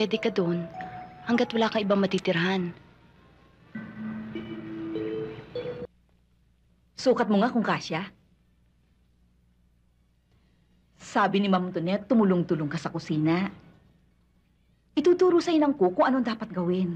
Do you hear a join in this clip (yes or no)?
yes